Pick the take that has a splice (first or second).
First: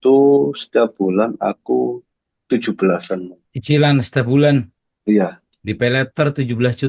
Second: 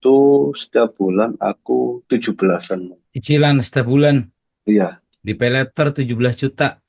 second